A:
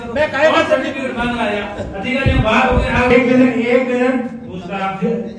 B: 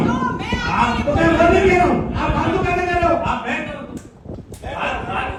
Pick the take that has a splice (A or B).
A